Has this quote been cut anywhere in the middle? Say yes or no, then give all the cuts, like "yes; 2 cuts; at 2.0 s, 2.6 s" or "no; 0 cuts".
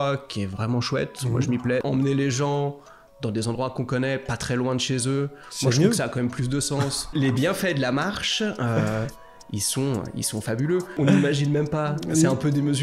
yes; 3 cuts; at 1.8 s, 7.1 s, 11.0 s